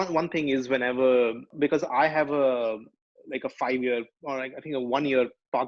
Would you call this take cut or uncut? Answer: cut